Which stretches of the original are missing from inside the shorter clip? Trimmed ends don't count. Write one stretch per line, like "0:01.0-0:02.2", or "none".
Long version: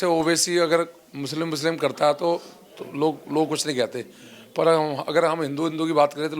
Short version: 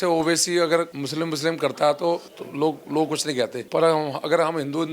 0:01.0-0:01.2
0:02.6-0:02.8
0:04.0-0:04.4

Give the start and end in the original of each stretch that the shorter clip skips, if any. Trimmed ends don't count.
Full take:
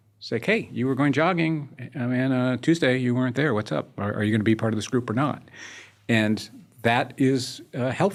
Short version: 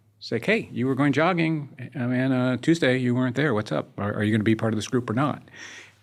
none

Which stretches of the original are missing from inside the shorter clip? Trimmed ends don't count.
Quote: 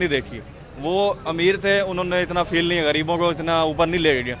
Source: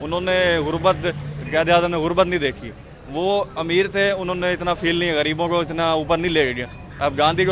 none

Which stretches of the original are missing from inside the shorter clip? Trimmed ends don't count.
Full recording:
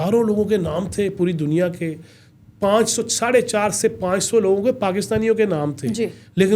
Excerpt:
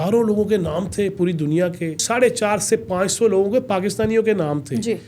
0:02.0-0:03.1

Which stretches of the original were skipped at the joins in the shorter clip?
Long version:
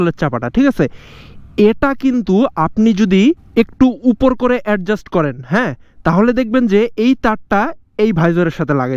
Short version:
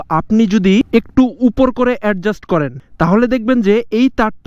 0:03.3-0:03.4
0:05.4-0:05.8

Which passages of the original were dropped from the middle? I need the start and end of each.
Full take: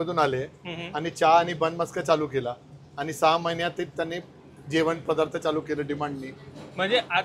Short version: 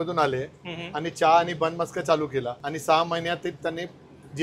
0:02.6-0:03.0

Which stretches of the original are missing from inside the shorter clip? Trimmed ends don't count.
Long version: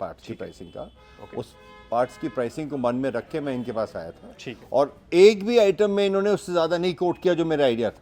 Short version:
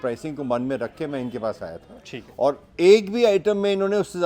none

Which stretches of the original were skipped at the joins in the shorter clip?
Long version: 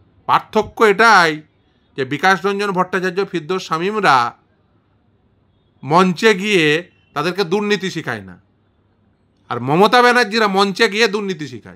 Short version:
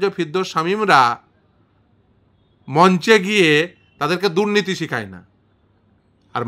none

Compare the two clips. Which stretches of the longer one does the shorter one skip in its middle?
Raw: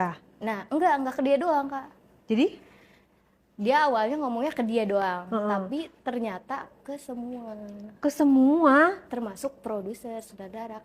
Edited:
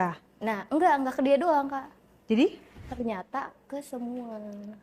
0:02.9-0:06.0

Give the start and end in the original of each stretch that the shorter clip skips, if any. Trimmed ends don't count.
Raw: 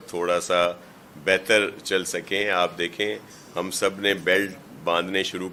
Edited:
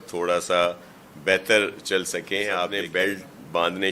0:02.8-0:04.1

